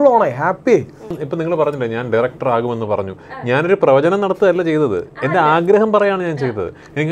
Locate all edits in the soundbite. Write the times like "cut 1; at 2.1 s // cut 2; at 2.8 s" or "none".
cut 1; at 1.2 s